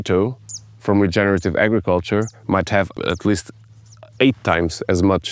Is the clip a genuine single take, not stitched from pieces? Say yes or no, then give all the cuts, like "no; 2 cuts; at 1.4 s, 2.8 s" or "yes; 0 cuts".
no; 1 cut; at 3.0 s